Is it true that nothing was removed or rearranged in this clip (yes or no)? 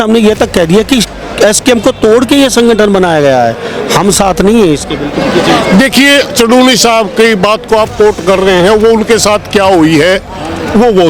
yes